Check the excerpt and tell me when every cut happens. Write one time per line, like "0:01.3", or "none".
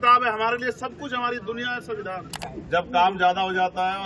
0:02.4